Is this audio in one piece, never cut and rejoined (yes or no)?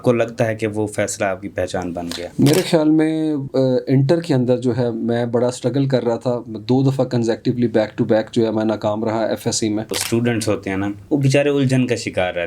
no